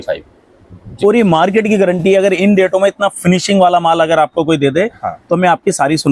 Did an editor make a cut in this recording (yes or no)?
no